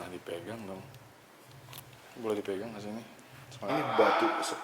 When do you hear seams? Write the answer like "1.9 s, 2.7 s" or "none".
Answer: 3.7 s